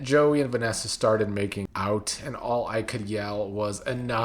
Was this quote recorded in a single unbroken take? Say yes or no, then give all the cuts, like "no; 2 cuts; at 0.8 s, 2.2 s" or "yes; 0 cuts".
no; 1 cut; at 1.6 s